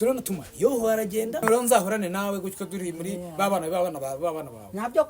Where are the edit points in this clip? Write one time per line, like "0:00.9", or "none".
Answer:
0:01.4